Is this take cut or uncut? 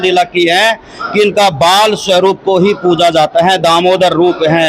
uncut